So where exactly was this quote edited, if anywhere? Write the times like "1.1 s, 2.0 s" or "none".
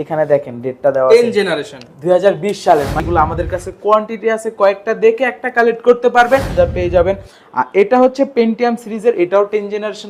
3.0 s, 6.5 s